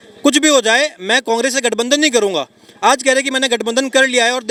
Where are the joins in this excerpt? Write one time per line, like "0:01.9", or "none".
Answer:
none